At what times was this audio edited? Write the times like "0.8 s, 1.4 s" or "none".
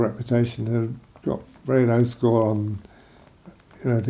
none